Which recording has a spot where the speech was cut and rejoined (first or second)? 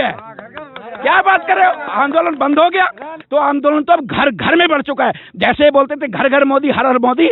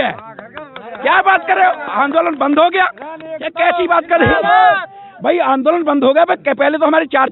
first